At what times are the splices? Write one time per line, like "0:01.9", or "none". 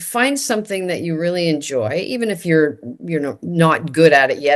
none